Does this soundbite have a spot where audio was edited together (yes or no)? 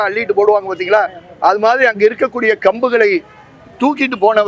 no